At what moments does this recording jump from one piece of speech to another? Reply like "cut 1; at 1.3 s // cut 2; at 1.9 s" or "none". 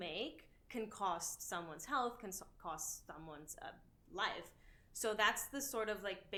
none